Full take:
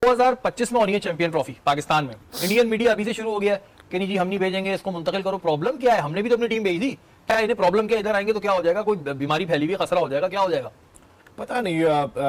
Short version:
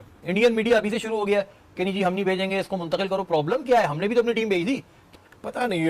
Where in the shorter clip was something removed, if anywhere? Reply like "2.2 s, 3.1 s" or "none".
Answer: 4.9 s